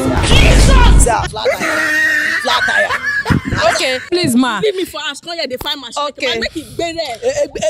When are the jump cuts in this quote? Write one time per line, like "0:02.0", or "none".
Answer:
0:04.0